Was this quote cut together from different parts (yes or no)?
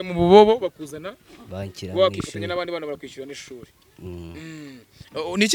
no